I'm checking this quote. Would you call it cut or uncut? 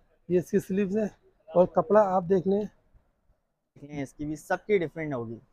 cut